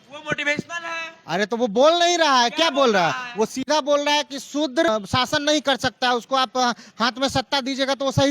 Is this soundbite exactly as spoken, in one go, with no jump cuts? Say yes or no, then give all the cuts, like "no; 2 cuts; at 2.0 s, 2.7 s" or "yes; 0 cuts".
no; 1 cut; at 4.9 s